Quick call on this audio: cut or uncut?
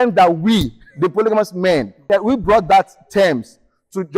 cut